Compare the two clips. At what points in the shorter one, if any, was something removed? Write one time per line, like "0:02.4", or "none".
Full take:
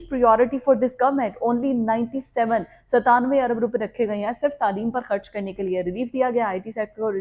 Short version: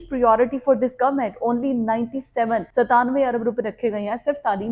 0:02.7